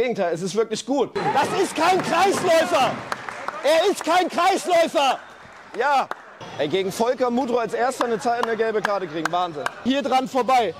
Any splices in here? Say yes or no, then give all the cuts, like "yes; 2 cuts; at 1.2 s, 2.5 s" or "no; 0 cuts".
yes; 3 cuts; at 1.1 s, 6.5 s, 9.8 s